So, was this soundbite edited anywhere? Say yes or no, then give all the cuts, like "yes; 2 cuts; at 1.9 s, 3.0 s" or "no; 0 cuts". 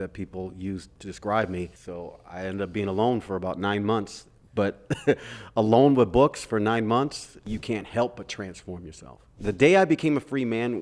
yes; 4 cuts; at 1.0 s, 1.8 s, 7.5 s, 9.4 s